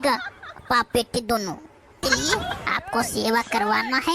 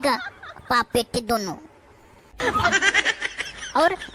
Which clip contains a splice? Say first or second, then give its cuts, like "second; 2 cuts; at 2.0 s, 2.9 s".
first; 1 cut; at 2.0 s